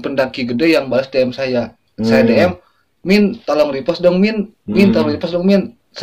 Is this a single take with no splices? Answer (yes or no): yes